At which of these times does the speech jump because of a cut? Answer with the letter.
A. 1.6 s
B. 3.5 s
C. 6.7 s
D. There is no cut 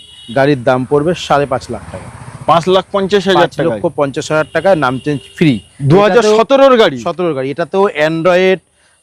D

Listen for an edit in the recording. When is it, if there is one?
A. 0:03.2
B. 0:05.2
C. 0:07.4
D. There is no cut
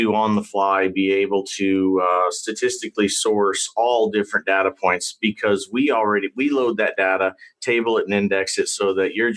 D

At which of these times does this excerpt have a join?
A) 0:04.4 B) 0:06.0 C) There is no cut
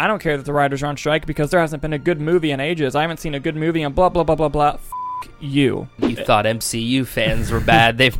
B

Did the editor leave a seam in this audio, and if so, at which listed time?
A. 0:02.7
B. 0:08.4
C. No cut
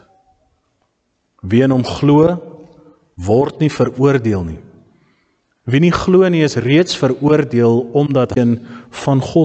B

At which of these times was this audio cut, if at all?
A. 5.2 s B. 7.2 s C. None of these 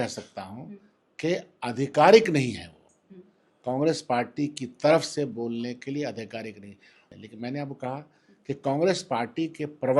B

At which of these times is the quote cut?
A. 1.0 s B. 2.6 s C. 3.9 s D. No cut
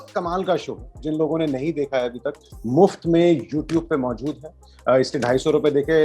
A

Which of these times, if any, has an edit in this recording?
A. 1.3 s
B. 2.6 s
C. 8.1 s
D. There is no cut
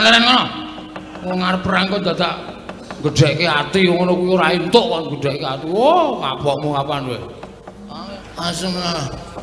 C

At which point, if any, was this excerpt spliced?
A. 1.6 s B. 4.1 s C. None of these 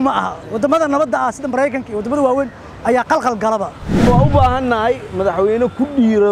B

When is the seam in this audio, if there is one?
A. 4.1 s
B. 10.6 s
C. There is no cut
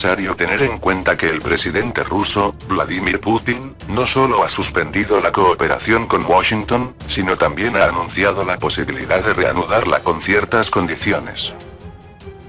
A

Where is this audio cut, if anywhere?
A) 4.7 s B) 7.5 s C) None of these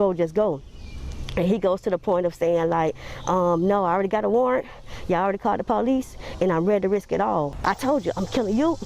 B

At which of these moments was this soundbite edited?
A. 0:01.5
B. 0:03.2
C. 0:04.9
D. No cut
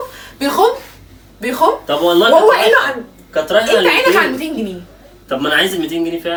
D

